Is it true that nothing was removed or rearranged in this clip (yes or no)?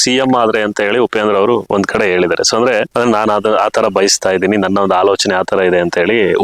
no